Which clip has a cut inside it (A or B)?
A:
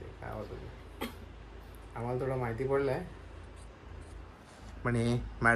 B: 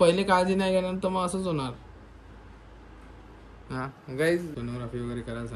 B